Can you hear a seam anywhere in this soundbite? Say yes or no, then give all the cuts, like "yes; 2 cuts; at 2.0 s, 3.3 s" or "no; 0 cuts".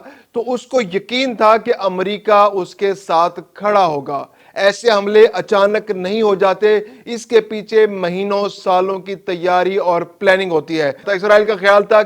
yes; 1 cut; at 11.1 s